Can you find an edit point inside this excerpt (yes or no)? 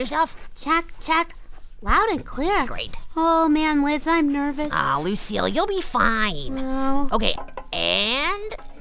yes